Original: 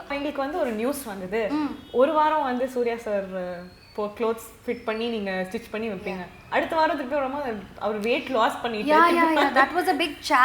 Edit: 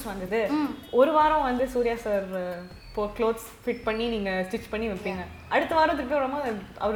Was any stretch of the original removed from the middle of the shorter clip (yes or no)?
no